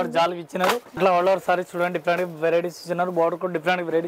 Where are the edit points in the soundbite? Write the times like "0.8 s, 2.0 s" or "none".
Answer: 1.0 s